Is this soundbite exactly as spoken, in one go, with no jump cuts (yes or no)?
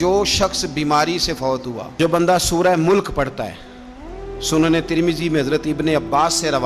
no